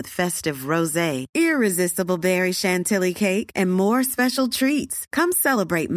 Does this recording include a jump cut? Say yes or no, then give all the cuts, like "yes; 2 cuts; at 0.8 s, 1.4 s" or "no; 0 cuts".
no; 0 cuts